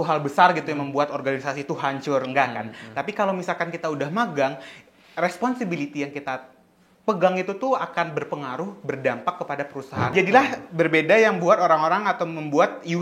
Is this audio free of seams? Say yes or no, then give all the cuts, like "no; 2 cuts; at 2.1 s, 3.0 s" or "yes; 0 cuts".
no; 1 cut; at 10.1 s